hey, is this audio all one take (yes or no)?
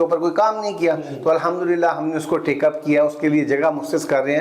yes